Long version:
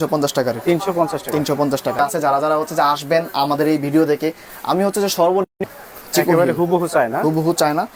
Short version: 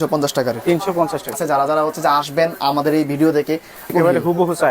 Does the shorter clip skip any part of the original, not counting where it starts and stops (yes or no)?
yes